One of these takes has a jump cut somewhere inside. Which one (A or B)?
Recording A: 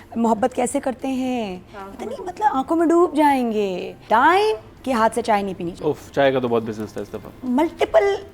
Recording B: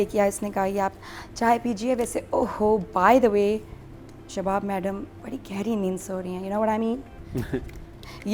A